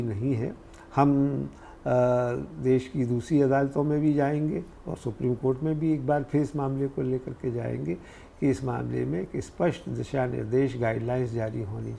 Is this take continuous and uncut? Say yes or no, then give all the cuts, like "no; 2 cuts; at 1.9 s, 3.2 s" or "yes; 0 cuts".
yes; 0 cuts